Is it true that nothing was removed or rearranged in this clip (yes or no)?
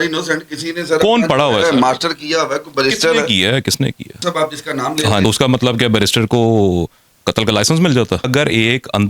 no